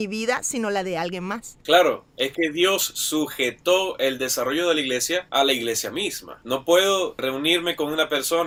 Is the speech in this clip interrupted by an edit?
no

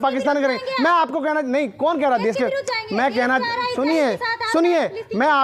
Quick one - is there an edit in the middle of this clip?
no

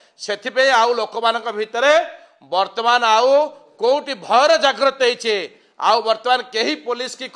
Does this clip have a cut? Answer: no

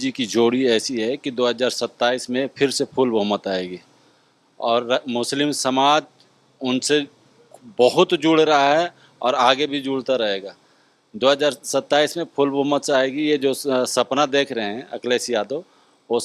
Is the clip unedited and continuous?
yes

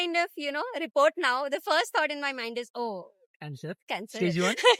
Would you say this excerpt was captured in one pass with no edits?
yes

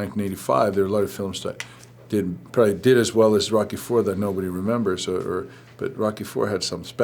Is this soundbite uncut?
yes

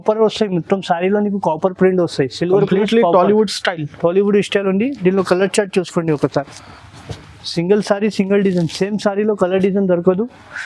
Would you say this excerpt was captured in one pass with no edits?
yes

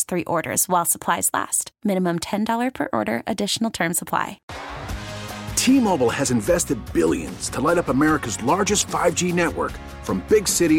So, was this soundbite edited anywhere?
yes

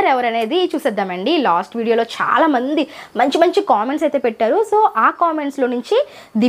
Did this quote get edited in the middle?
no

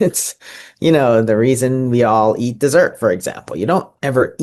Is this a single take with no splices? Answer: yes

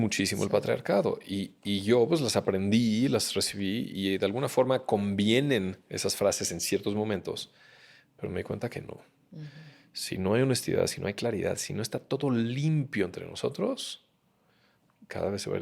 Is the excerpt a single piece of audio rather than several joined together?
yes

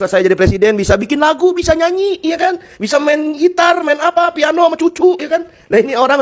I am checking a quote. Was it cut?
no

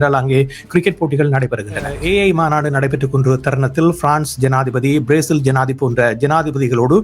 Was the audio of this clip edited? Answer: yes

